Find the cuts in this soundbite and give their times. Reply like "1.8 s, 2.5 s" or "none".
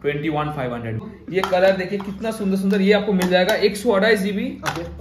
1.1 s

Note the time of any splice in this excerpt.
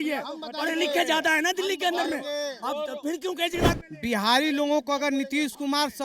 3.8 s

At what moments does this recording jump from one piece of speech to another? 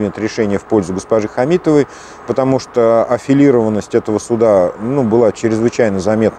none

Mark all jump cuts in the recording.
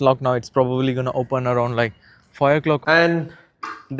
2.8 s

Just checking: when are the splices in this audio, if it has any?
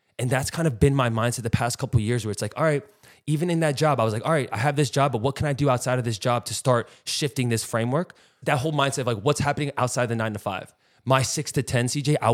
8.4 s

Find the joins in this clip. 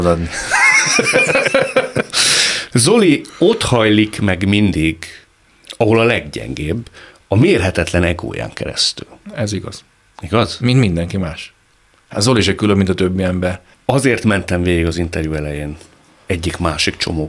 13.7 s

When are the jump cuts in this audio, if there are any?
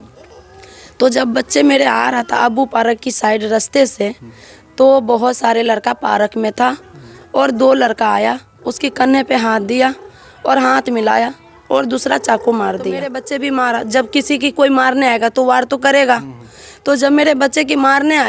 13.2 s

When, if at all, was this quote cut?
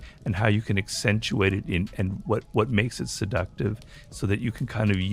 none

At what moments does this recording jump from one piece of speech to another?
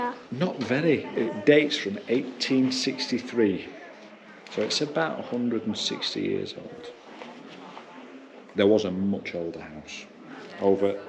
none

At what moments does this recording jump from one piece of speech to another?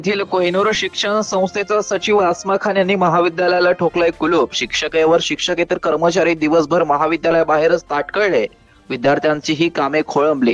none

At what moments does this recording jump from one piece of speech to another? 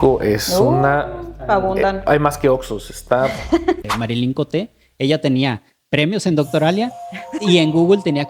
3.8 s

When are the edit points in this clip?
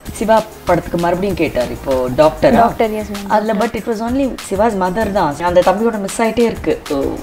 4.4 s, 5.4 s

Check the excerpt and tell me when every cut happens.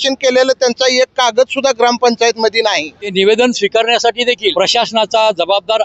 3.0 s, 4.5 s

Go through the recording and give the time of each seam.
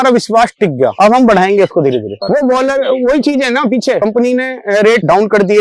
none

